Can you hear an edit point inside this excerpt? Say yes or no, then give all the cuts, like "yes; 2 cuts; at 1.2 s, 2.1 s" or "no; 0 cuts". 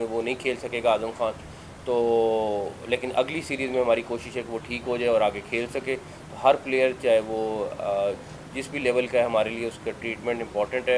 no; 0 cuts